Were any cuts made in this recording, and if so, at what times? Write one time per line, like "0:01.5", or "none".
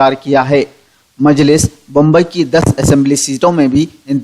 0:03.1